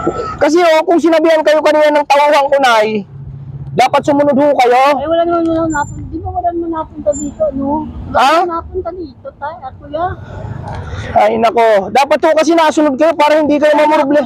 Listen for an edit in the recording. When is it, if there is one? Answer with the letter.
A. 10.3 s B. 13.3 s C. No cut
C